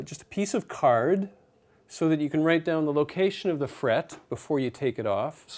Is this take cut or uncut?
cut